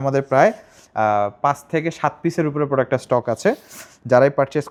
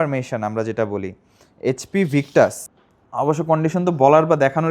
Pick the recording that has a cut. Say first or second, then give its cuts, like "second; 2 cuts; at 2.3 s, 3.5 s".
second; 1 cut; at 2.7 s